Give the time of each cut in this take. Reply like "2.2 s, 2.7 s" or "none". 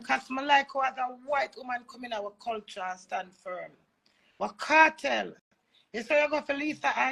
none

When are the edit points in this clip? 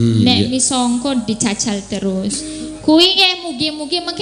none

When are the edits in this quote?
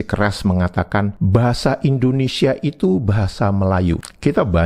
1.1 s

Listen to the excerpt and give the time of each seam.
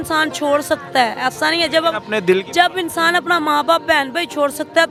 none

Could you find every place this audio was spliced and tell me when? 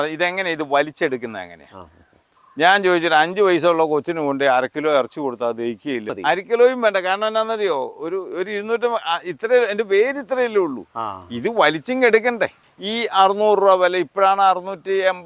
6.1 s, 12.6 s

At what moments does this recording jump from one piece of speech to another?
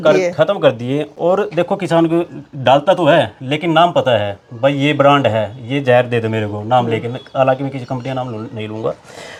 none

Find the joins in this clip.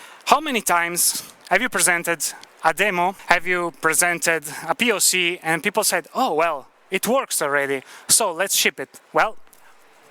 3.2 s

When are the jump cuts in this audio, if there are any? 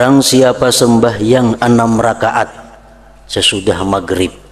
none

